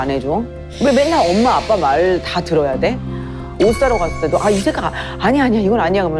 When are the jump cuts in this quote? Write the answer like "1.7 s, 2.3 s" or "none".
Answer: none